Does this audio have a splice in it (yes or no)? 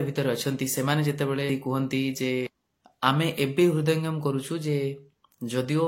yes